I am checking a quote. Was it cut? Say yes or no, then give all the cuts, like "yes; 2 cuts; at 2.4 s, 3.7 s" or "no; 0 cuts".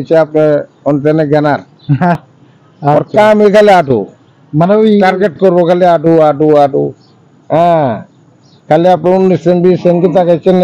yes; 1 cut; at 2.2 s